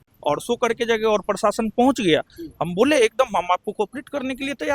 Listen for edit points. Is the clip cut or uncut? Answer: uncut